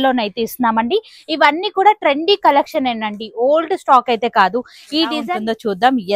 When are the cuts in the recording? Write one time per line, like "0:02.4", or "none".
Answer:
0:05.2